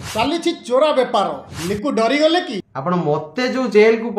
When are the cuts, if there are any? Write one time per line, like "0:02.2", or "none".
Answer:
0:02.6